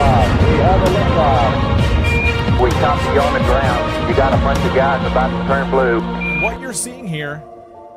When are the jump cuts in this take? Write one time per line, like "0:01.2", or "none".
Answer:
0:06.9